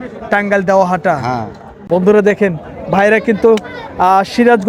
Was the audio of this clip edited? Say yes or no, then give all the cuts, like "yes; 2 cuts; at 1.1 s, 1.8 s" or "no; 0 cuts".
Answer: no; 0 cuts